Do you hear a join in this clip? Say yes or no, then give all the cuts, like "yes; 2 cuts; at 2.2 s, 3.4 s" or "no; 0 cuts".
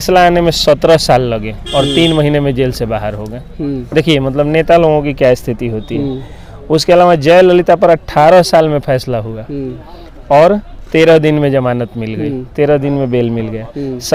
no; 0 cuts